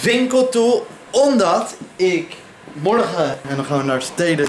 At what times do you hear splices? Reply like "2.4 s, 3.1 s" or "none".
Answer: 3.4 s